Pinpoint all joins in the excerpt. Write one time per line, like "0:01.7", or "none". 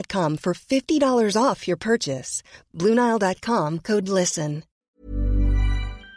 0:04.7